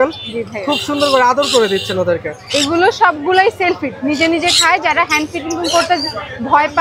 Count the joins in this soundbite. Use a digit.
0